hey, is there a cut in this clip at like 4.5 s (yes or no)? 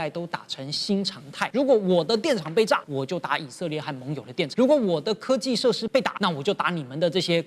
yes